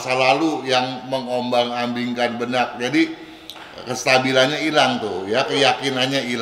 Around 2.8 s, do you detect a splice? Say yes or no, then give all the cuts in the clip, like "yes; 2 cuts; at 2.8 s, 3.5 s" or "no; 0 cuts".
no; 0 cuts